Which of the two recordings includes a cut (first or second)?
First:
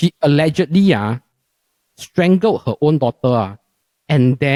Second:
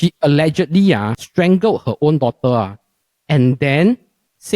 second